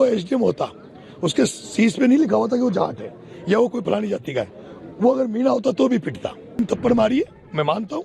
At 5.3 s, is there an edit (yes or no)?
no